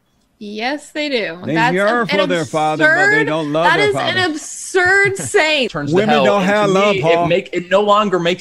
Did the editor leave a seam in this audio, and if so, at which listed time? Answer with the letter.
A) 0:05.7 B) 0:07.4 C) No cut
A